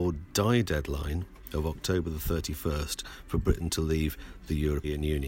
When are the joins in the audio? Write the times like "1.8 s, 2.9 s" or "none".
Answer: none